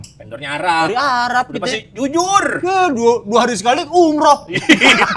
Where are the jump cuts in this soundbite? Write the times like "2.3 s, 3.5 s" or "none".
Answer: none